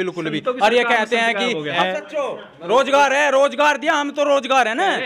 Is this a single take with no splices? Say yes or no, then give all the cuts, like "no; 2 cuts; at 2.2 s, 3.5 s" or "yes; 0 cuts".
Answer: no; 1 cut; at 1.8 s